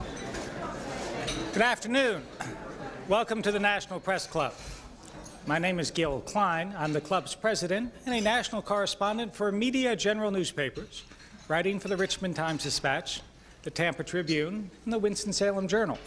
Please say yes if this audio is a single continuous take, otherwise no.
yes